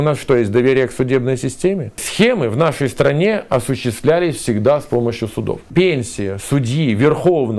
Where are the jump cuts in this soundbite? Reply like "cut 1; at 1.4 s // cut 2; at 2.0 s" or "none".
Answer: cut 1; at 2.1 s // cut 2; at 5.6 s